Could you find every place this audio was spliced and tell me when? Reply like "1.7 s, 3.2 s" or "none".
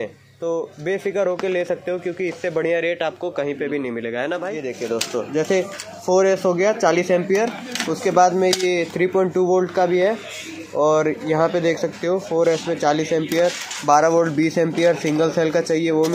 4.8 s

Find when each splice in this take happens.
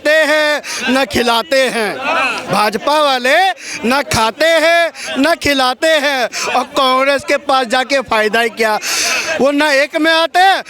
none

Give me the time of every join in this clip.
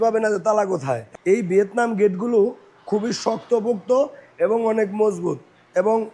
1.1 s

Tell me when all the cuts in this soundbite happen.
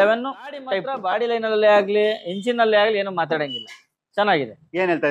0.9 s

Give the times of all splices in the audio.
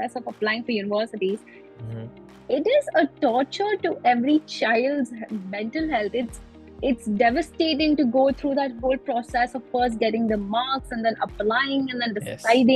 none

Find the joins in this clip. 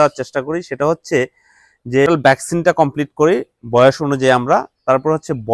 none

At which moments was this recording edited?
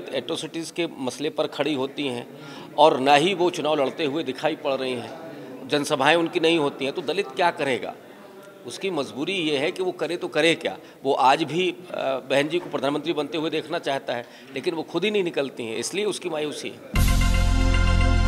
16.8 s

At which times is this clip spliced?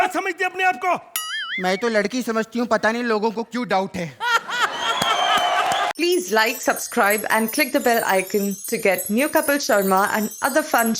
5.9 s

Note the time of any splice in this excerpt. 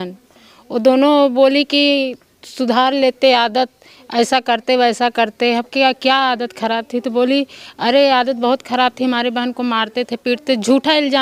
none

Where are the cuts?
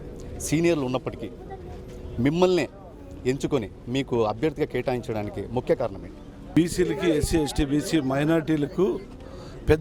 6.6 s

